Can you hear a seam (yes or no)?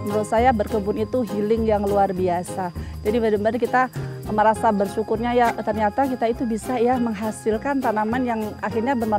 no